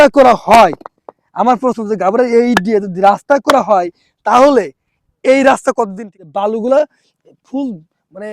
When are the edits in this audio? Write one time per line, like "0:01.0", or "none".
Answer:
0:06.3